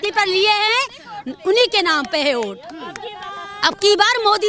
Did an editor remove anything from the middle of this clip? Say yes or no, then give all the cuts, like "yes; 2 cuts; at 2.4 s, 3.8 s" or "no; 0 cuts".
no; 0 cuts